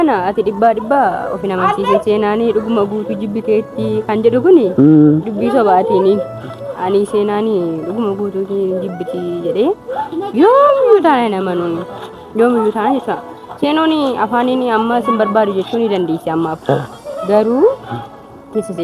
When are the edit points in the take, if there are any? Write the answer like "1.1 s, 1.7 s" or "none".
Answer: none